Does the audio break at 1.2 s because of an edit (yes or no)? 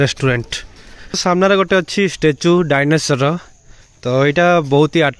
yes